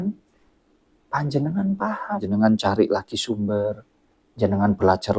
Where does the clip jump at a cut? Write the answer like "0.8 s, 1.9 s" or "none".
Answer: 2.2 s